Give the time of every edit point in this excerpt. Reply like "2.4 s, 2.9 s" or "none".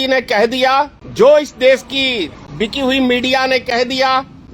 1.0 s, 2.4 s